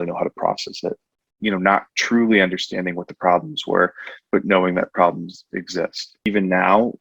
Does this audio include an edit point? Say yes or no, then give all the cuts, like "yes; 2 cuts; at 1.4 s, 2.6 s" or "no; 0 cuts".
yes; 2 cuts; at 1.2 s, 6.3 s